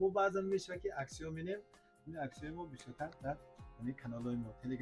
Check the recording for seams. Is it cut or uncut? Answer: uncut